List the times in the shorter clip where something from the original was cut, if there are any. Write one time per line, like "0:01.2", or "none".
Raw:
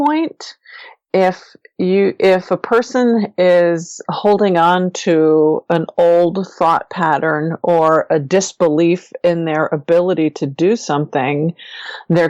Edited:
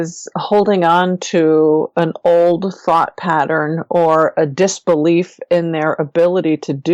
none

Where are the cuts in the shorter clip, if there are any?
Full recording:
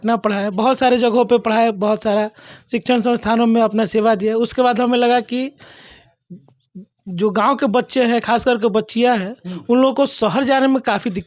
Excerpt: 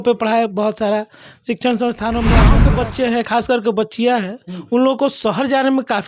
0:02.6

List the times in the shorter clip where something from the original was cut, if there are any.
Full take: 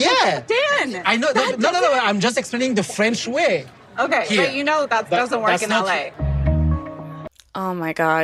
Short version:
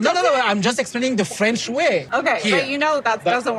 0:02.1

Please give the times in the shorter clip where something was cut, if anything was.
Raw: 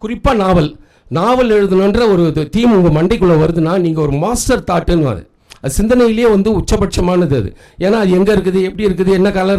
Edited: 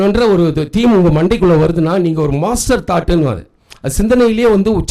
none

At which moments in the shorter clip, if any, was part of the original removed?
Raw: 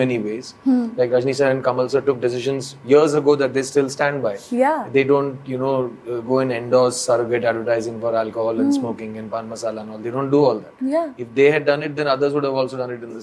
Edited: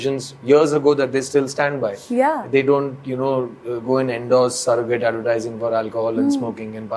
none

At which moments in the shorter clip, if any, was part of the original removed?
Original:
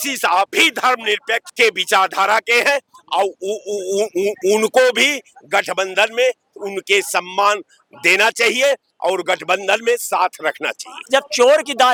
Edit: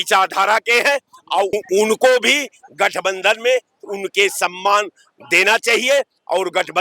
0:01.5

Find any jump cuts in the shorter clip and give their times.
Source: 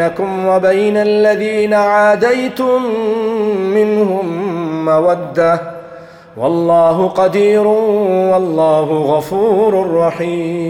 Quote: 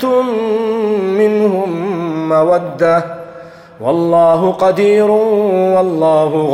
none

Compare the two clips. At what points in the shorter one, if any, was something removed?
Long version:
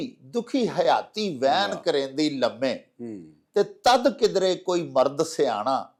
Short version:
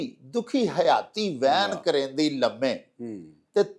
none

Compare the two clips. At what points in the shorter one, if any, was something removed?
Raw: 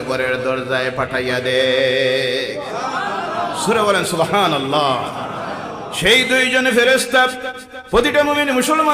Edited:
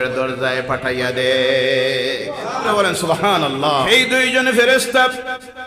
0:02.7
0:03.9

